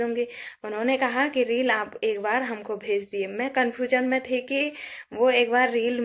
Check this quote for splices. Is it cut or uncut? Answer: uncut